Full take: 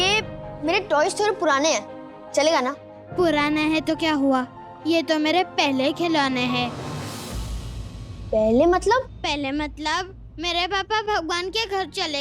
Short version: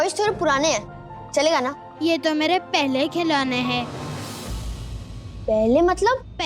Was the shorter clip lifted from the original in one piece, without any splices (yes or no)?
no